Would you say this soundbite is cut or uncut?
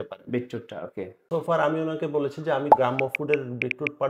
cut